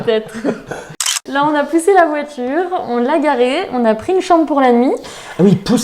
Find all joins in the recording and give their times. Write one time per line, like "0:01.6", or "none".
0:01.0